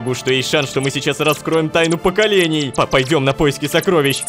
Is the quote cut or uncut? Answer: cut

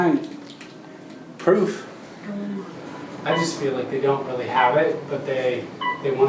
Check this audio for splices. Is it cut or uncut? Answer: cut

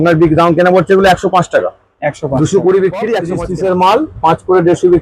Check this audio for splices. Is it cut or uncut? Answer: cut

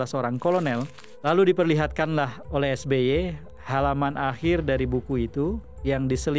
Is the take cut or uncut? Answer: cut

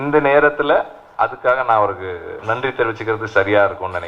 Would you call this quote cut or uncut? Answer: cut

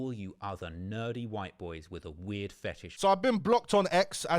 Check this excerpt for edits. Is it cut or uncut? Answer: cut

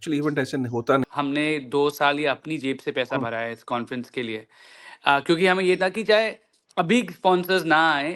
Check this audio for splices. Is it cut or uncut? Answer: cut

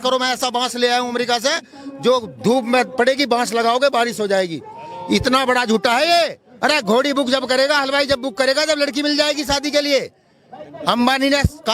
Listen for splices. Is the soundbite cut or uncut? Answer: cut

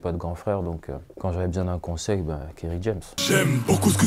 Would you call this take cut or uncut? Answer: cut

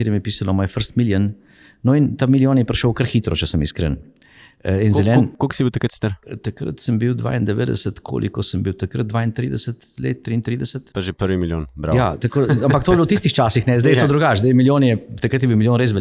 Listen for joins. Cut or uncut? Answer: uncut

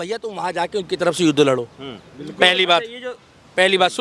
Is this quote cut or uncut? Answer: uncut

